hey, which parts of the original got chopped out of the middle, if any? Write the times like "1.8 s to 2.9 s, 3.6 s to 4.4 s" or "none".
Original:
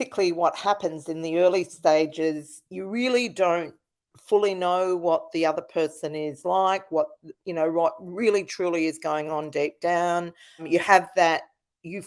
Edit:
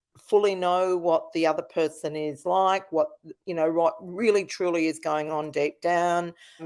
none